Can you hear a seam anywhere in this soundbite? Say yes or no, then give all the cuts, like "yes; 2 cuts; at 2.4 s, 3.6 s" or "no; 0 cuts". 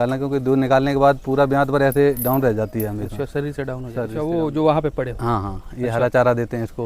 yes; 1 cut; at 4.1 s